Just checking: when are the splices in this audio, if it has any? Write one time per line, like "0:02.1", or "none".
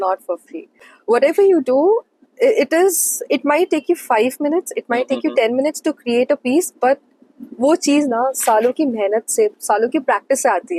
none